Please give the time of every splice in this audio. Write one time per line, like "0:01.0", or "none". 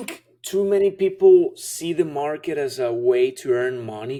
none